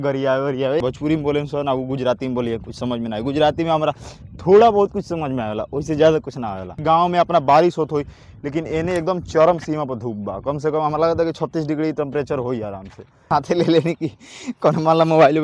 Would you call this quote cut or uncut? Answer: cut